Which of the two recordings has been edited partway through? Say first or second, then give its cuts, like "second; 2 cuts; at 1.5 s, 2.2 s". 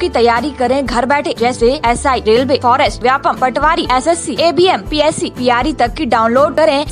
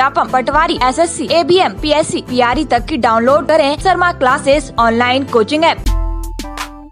second; 1 cut; at 5.8 s